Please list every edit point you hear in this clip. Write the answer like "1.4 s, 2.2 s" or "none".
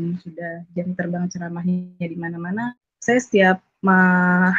2.7 s